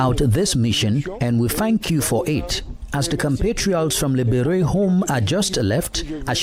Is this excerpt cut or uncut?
uncut